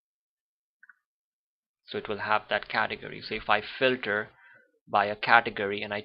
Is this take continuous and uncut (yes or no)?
yes